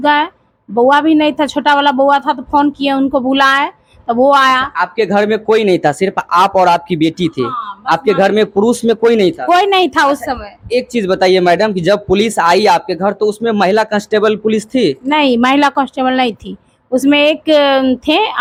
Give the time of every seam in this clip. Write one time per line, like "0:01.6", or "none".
none